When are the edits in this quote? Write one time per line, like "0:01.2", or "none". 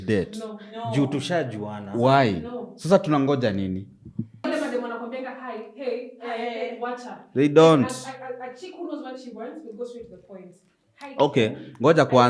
0:04.4